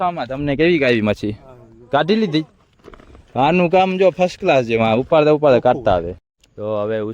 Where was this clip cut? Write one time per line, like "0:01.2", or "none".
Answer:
0:06.2